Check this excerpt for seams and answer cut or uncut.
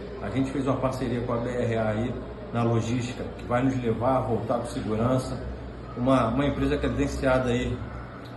uncut